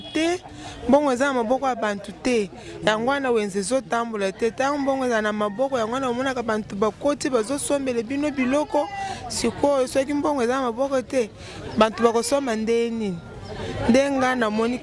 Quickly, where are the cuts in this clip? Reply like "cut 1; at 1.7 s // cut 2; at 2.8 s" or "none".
none